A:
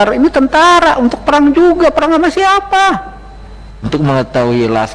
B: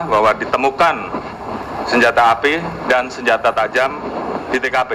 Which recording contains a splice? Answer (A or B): A